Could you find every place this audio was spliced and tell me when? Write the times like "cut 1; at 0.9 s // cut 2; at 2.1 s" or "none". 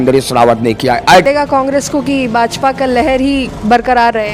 cut 1; at 1.2 s